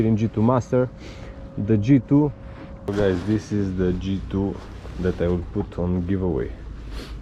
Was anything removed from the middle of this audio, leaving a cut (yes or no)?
yes